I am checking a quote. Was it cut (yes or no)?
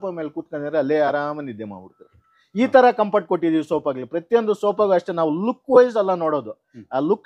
no